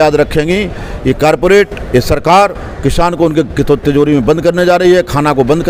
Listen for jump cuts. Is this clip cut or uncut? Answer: uncut